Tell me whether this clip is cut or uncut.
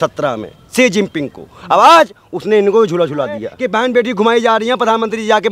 cut